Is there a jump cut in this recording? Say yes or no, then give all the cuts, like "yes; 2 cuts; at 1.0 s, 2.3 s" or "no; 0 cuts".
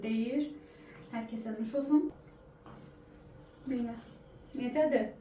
yes; 1 cut; at 2.1 s